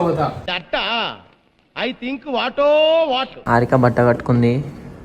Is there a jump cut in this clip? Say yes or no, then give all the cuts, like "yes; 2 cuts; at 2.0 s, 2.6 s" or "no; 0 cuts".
yes; 1 cut; at 3.4 s